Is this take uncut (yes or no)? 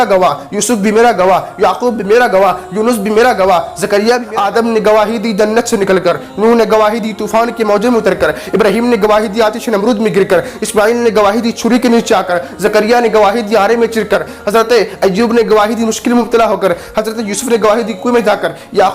no